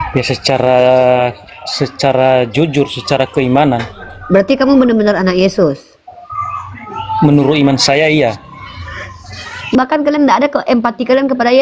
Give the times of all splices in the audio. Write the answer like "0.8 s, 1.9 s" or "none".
9.7 s

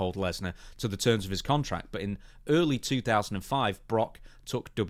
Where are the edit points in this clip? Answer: none

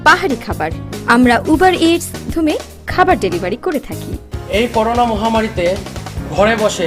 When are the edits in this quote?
2.3 s

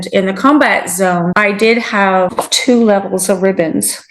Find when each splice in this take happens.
1.3 s, 2.4 s

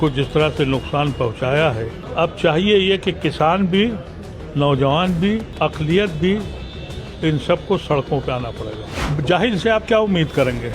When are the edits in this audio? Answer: 2.0 s, 5.5 s, 9.0 s

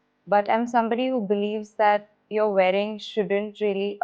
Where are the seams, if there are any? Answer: 2.1 s

